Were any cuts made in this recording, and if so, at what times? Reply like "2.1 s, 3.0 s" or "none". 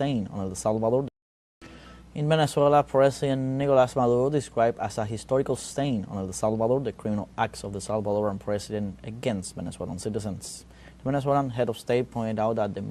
1.3 s